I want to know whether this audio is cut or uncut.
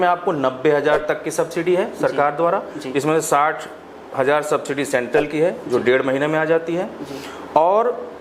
uncut